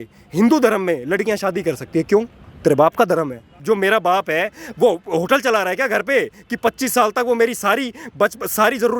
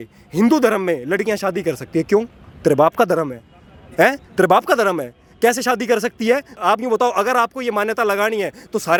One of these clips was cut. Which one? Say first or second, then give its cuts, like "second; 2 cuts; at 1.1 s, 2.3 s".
first; 1 cut; at 3.5 s